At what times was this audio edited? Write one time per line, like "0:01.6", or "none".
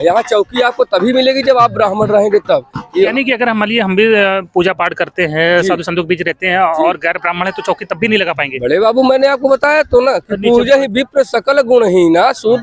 0:03.1